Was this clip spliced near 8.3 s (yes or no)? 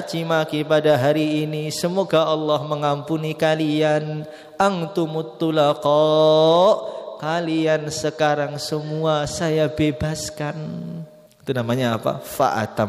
no